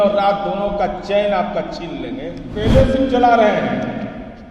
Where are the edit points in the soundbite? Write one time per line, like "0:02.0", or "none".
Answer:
0:02.5